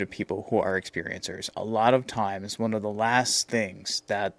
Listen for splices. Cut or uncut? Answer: cut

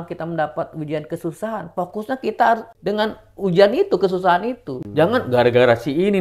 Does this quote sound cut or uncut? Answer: cut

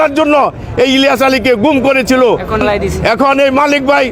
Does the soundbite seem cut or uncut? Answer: uncut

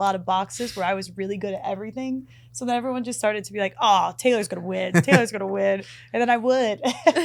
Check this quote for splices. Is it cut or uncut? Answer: uncut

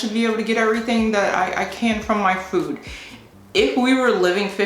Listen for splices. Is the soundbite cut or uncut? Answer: uncut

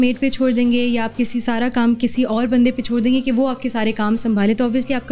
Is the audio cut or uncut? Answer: uncut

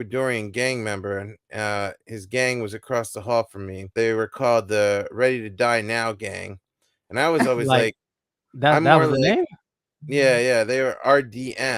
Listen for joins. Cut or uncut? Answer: cut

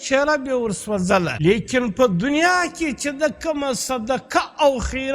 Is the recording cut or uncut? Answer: cut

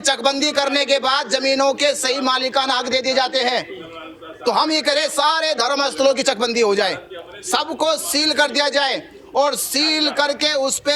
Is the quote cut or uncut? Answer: uncut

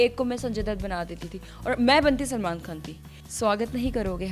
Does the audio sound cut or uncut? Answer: cut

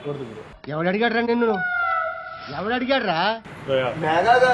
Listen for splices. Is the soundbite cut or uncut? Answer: cut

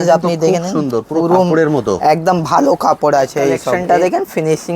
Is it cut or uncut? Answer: cut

